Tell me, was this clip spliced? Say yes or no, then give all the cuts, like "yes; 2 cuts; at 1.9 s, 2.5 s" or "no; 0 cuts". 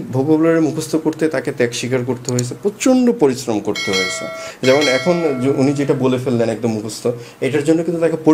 no; 0 cuts